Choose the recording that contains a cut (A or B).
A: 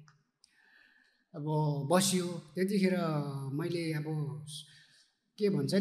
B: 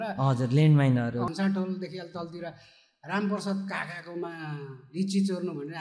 B